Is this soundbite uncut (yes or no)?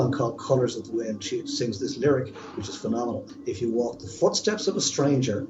no